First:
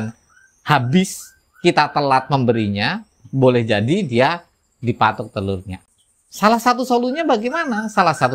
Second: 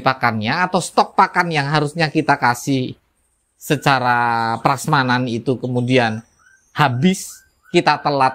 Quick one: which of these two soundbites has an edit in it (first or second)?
first